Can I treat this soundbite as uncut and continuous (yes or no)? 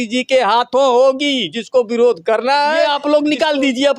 no